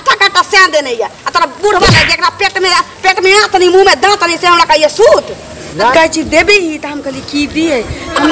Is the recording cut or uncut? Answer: cut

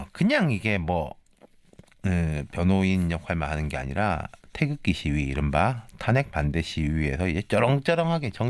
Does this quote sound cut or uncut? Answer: uncut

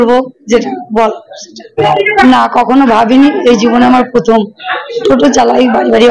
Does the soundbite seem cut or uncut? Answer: cut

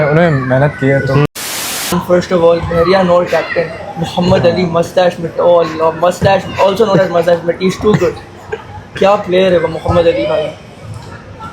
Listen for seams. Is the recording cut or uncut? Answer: cut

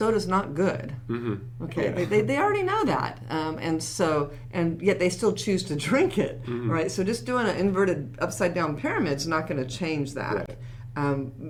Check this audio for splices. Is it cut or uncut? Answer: uncut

